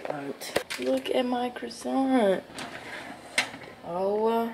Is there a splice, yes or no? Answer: no